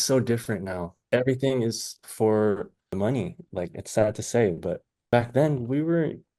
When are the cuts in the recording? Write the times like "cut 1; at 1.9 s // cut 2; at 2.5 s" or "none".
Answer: cut 1; at 0.9 s // cut 2; at 2.9 s // cut 3; at 4.9 s